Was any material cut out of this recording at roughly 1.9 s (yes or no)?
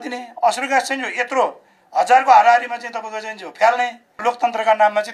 no